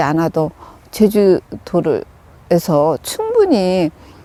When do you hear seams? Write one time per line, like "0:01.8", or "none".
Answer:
none